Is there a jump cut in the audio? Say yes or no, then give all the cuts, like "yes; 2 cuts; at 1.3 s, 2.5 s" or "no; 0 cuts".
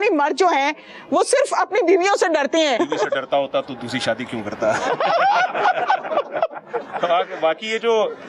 yes; 1 cut; at 2.8 s